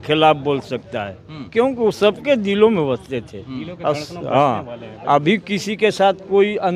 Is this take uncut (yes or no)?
yes